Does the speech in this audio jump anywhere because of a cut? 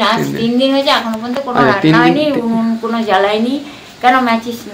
no; 0 cuts

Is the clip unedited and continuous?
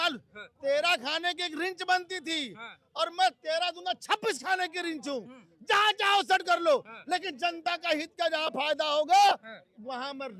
yes; 0 cuts

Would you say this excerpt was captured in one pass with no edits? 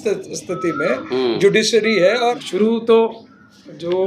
no; 1 cut; at 2.4 s

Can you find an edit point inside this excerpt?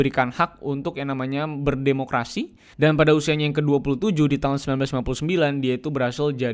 yes; 1 cut; at 2.6 s

